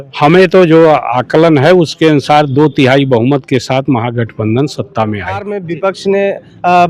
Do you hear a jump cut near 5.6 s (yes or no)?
yes